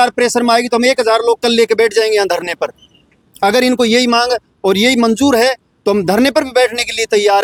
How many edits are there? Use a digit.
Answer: 0